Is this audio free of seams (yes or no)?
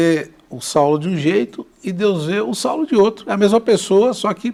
yes